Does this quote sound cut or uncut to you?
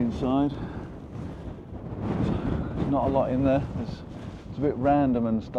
uncut